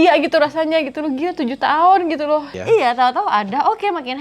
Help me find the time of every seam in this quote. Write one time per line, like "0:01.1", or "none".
0:02.6